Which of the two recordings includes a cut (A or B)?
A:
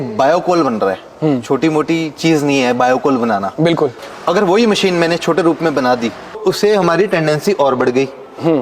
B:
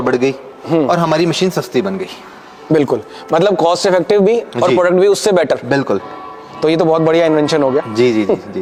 A